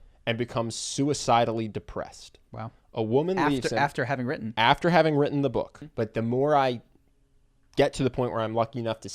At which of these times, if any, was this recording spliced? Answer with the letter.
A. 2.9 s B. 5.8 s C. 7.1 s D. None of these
B